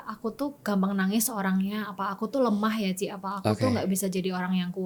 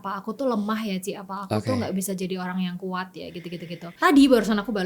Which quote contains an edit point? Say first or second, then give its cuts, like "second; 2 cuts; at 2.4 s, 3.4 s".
second; 1 cut; at 3.8 s